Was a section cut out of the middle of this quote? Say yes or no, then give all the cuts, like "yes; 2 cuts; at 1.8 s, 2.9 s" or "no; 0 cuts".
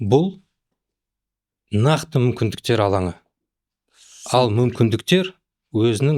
no; 0 cuts